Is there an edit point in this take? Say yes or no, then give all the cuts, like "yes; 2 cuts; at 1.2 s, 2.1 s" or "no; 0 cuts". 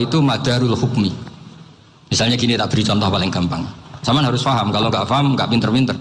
no; 0 cuts